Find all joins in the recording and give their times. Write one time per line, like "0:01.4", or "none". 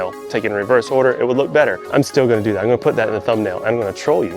0:01.8